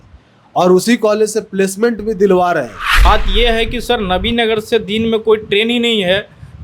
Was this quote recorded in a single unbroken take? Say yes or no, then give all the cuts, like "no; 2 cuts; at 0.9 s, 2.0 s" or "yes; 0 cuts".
no; 1 cut; at 2.9 s